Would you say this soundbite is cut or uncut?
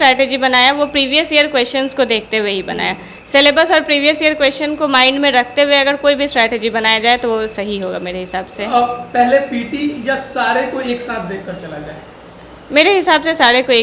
uncut